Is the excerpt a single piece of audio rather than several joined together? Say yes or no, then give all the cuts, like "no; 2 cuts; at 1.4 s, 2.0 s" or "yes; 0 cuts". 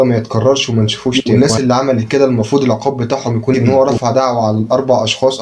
no; 2 cuts; at 1.2 s, 3.6 s